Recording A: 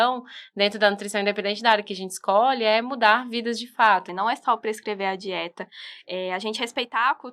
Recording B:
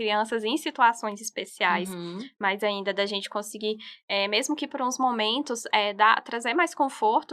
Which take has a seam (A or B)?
A